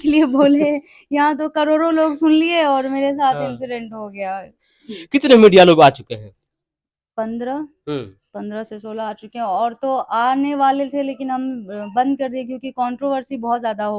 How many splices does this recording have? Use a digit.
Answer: 1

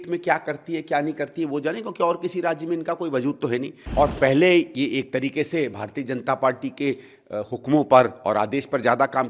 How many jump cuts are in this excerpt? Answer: 1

